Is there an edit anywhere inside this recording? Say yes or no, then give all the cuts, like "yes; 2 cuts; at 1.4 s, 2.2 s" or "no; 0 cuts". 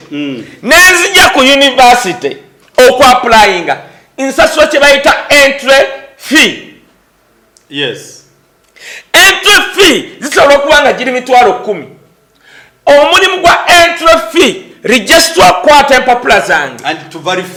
no; 0 cuts